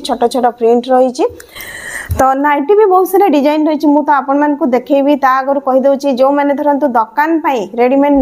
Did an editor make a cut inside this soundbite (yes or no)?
no